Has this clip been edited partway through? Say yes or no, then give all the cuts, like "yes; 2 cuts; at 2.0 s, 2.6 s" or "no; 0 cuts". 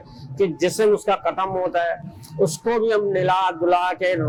no; 0 cuts